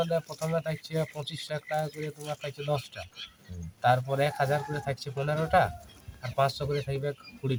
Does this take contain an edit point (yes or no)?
no